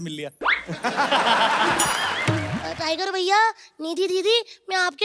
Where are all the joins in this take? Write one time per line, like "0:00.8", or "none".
0:02.5

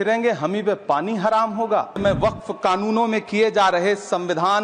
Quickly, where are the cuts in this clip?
0:02.0

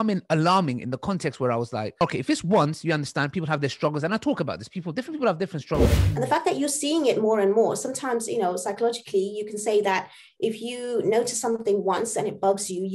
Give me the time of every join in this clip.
0:02.0
0:05.9

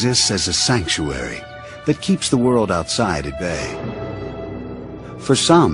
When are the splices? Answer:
none

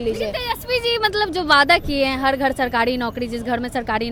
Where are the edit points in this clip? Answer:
none

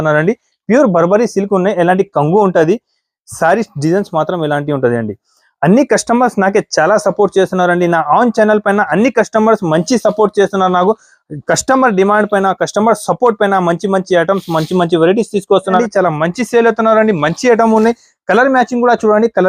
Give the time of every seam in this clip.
0:15.8

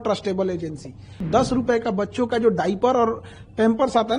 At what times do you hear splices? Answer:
0:01.2

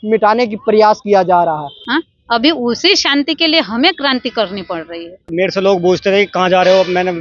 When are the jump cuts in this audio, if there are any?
0:01.7
0:05.3

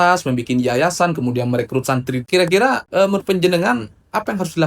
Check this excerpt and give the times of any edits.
0:02.3

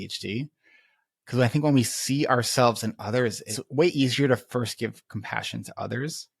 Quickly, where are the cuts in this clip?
0:03.6

